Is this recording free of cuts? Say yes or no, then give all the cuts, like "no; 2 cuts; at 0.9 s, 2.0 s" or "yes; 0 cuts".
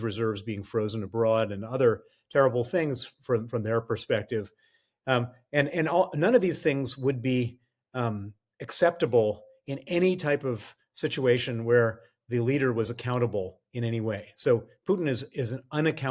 yes; 0 cuts